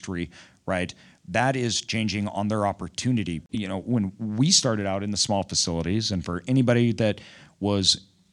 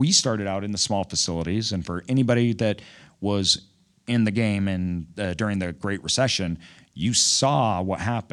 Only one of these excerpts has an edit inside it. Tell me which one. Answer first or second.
first